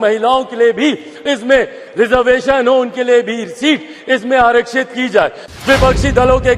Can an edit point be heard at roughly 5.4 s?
yes; 1 cut; at 5.4 s

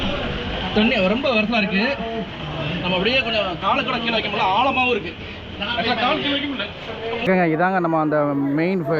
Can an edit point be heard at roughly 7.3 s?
yes; 1 cut; at 7.3 s

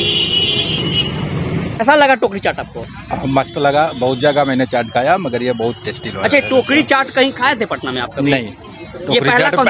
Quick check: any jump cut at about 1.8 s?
yes; 1 cut; at 1.8 s

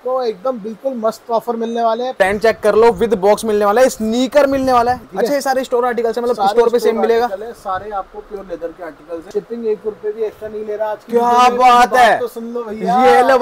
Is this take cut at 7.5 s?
no; 3 cuts; at 2.2 s, 5.1 s, 9.3 s

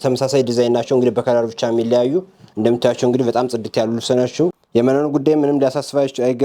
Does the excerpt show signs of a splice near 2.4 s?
no; 1 cut; at 4.6 s

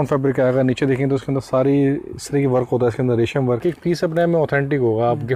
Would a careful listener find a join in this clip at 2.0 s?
no; 1 cut; at 3.6 s

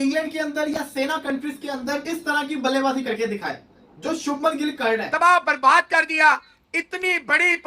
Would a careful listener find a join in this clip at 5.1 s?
yes; 2 cuts; at 2.0 s, 5.1 s

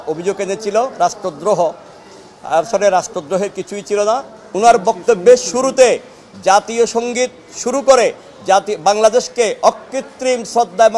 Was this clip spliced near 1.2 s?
no; 1 cut; at 4.4 s

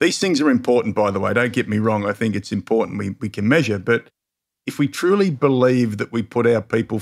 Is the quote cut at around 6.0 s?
no; 0 cuts

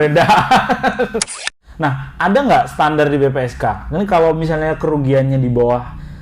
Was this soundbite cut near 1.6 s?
yes; 1 cut; at 1.6 s

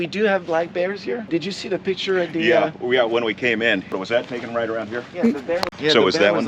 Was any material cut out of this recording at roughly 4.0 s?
yes; 1 cut; at 4.0 s

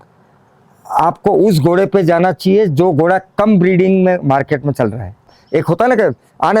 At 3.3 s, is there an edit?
no; 1 cut; at 5.4 s

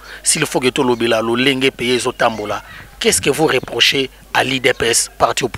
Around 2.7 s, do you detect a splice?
no; 0 cuts

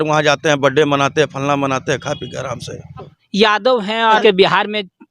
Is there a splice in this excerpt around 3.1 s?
yes; 1 cut; at 3.1 s

